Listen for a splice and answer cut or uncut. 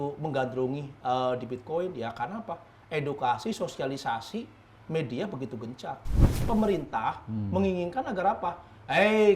cut